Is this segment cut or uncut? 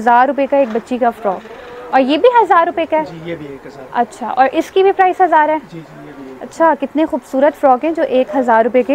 uncut